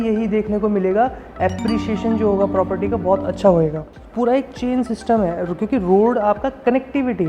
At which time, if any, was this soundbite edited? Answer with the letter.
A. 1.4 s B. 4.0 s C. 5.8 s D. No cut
B